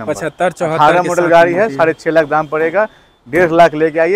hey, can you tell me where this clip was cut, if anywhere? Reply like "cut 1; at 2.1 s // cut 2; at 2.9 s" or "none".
none